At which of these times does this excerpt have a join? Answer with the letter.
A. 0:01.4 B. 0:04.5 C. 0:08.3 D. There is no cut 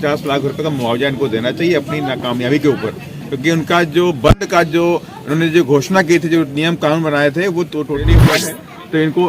C